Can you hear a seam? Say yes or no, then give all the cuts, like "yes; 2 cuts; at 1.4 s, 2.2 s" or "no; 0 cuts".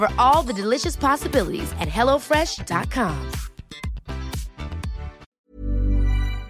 yes; 1 cut; at 5.2 s